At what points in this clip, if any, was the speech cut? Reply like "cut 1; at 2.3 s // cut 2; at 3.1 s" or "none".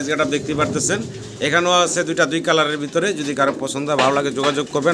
none